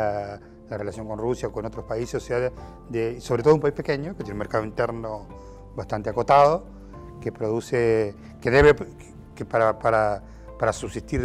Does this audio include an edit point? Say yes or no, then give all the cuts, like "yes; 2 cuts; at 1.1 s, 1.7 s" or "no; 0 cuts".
no; 0 cuts